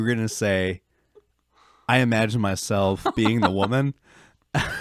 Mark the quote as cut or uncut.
uncut